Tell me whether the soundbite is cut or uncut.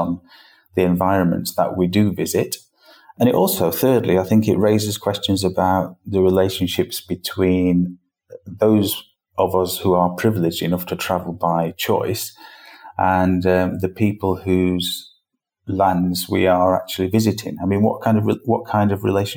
cut